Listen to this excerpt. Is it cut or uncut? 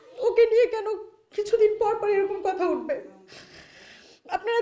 uncut